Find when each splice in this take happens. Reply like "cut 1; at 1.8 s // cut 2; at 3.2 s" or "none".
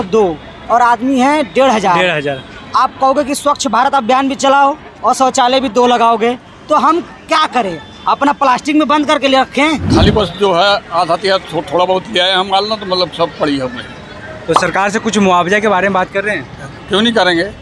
cut 1; at 9.9 s

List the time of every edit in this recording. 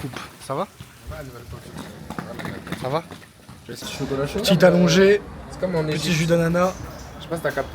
cut 1; at 3.9 s

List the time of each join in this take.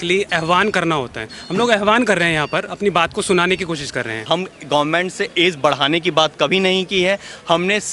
cut 1; at 4.2 s

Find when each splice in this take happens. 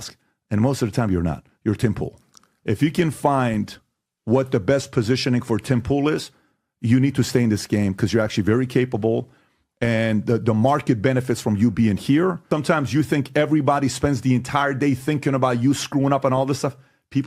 cut 1; at 12.4 s

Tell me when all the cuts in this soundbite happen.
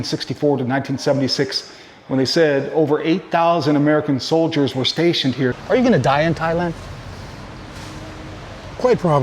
cut 1; at 5.6 s

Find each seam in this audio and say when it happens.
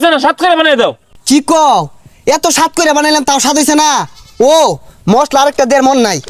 none

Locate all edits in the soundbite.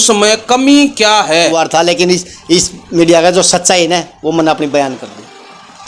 cut 1; at 1.5 s

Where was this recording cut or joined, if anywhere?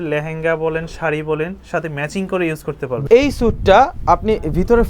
cut 1; at 3.0 s

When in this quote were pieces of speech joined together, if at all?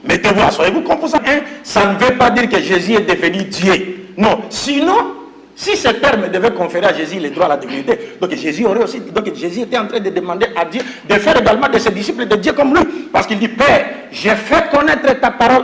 cut 1; at 1.2 s

